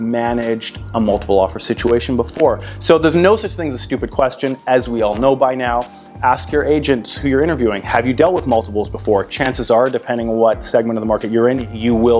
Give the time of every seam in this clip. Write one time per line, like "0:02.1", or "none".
none